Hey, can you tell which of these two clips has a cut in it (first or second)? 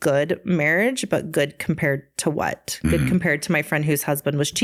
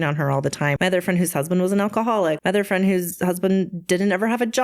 second